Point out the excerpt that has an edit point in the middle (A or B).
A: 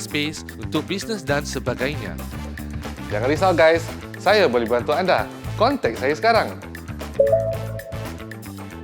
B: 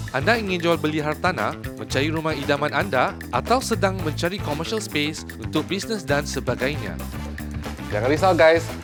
A